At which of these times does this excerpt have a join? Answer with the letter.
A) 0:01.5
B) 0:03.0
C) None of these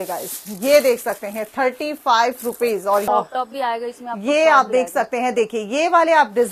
B